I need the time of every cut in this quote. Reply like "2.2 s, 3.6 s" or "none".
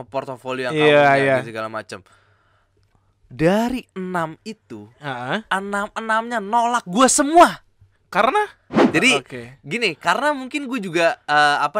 8.8 s